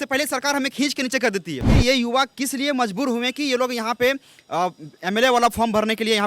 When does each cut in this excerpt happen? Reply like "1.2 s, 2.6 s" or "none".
1.8 s